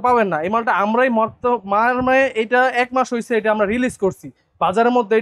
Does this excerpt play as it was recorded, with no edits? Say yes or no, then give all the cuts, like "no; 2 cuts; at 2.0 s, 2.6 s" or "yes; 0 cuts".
yes; 0 cuts